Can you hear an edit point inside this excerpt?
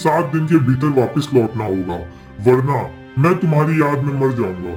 no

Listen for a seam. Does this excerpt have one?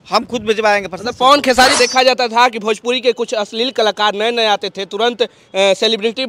yes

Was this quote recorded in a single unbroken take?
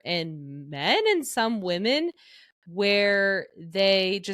yes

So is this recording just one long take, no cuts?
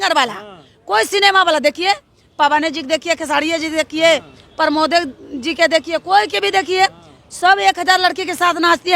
yes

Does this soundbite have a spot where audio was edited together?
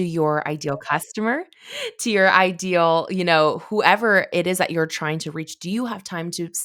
no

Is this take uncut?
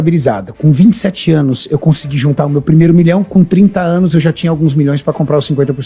yes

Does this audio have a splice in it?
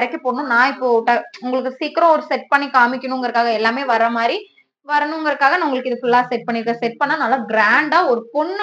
no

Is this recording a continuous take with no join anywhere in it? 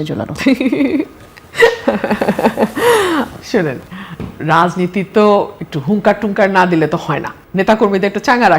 yes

